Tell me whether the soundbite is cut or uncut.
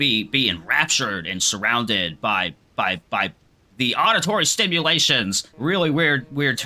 uncut